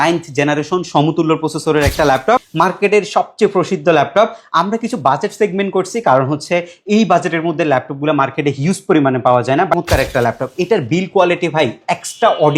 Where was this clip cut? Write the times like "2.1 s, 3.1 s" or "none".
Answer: 2.5 s, 9.8 s